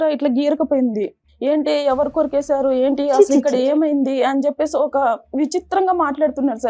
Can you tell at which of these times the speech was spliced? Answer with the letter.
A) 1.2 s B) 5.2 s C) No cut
A